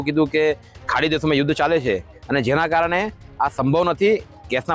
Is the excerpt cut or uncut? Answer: uncut